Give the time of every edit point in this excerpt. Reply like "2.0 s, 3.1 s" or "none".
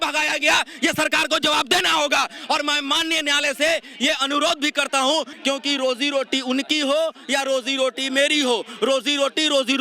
5.3 s